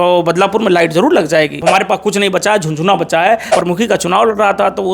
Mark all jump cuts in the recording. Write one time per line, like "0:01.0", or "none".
0:01.6
0:03.5